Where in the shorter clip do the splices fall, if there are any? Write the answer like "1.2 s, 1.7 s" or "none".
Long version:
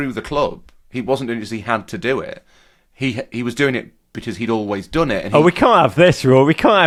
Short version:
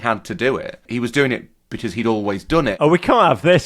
0.8 s, 2.8 s